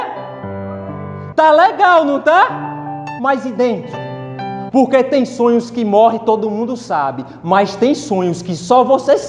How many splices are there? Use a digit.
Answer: 0